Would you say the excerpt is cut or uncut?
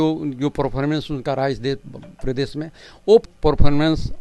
cut